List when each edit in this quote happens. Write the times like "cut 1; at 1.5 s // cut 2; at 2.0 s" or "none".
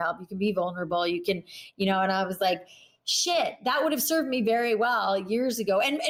none